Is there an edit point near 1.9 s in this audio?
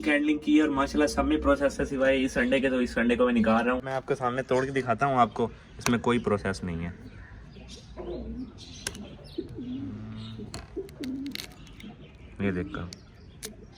no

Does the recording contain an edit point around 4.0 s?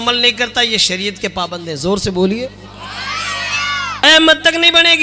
yes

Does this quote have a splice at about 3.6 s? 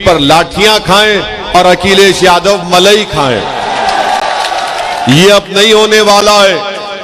no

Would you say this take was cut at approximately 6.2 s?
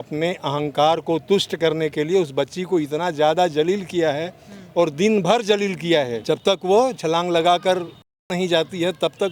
yes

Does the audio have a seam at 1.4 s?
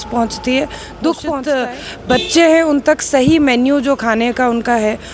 yes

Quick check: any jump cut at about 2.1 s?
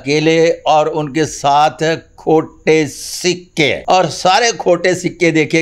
no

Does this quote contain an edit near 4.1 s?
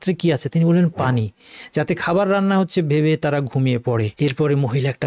yes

